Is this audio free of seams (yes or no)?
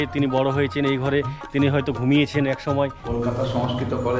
no